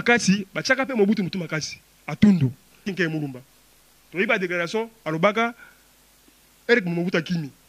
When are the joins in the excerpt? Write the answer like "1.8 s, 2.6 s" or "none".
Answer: 2.9 s